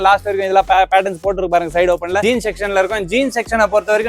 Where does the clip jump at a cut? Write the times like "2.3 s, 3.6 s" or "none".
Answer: 2.2 s